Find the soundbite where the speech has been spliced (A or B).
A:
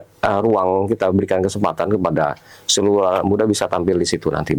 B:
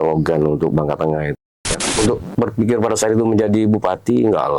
B